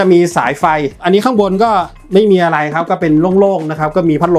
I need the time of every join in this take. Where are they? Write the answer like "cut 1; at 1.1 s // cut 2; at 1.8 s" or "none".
none